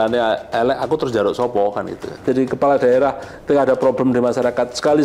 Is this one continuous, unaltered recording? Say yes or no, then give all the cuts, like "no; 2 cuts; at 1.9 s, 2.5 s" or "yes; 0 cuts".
no; 1 cut; at 2.2 s